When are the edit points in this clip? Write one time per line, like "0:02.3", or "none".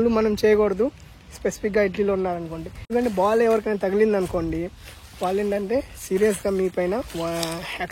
0:02.7